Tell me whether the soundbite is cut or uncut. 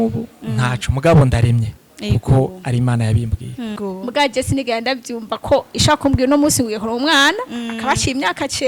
cut